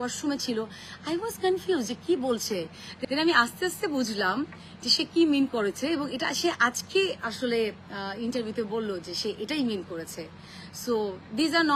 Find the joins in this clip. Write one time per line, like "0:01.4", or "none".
none